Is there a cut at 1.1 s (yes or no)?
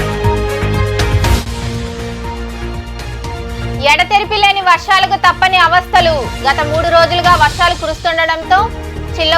yes